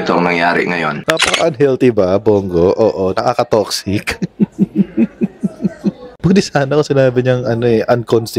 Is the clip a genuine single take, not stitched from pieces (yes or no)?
no